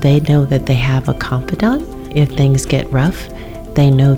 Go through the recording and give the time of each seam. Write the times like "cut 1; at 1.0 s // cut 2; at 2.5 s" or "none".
cut 1; at 2.0 s